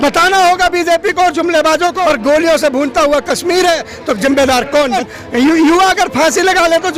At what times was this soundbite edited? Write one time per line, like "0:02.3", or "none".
0:02.0
0:05.0